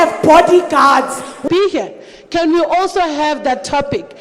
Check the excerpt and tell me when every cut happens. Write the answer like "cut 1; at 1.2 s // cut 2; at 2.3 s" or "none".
cut 1; at 1.4 s